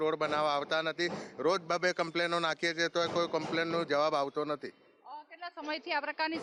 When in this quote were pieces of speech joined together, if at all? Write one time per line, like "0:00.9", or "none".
none

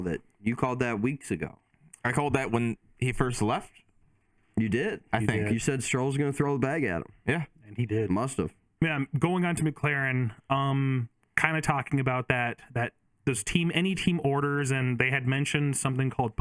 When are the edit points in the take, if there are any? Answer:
0:08.8

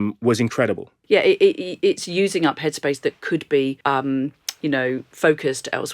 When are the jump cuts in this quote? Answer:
0:00.9
0:03.8
0:05.1

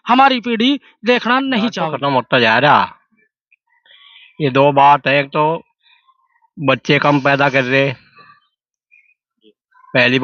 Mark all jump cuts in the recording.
0:01.8

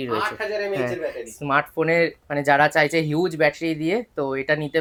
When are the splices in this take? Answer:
none

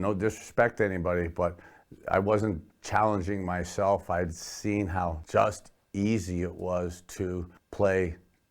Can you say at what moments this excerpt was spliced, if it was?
0:05.2
0:07.6

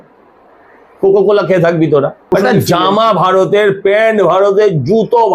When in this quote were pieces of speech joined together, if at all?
0:02.2

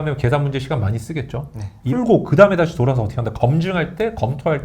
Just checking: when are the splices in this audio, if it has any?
0:01.9

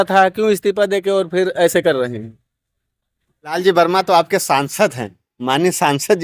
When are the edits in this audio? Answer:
0:03.4

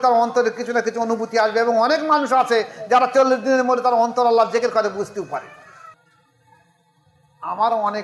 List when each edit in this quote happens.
0:05.9

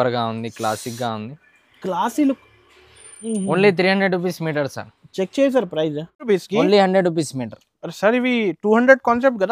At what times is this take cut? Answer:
0:06.3

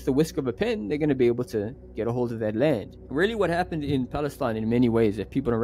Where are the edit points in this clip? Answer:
0:03.0

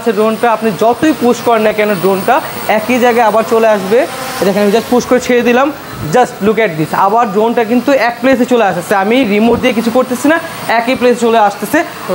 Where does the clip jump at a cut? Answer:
none

